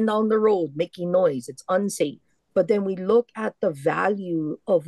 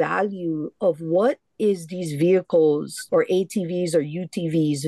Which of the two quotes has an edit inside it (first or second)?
first